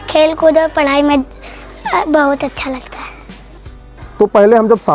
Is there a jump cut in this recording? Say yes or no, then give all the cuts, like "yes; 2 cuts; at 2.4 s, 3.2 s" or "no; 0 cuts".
no; 0 cuts